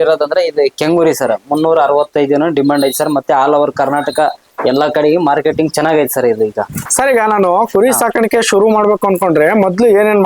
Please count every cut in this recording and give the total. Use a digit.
1